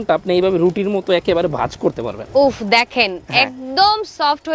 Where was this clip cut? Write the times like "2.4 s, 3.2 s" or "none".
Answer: none